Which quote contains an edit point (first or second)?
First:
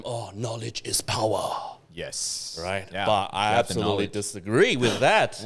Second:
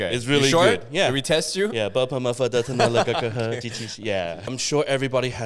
second